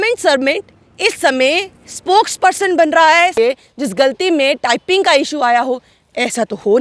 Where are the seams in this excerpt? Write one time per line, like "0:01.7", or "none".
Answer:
0:03.3

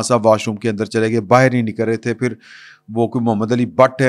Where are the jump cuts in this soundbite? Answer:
none

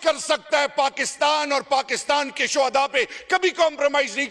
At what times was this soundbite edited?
none

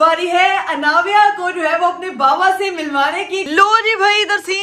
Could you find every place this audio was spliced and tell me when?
0:03.5

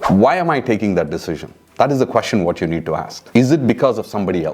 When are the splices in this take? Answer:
0:03.2

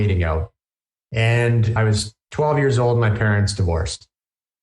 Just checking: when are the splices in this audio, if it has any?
0:01.8

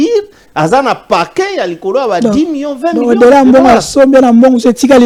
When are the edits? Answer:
none

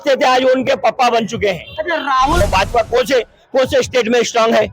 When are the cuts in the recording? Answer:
0:02.4

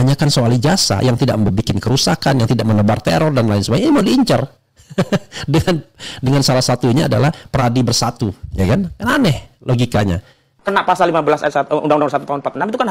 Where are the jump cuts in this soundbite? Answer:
0:10.5

